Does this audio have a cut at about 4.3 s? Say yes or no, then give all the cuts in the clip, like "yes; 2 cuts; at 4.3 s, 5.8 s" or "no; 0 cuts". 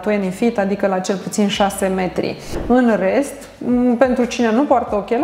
no; 1 cut; at 2.5 s